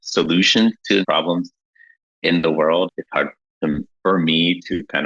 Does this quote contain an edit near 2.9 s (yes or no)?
yes